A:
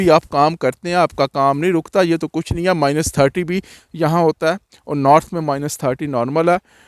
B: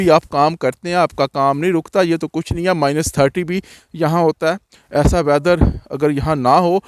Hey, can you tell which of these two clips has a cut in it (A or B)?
B